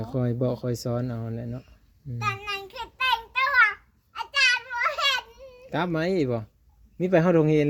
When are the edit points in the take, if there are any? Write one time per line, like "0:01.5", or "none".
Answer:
none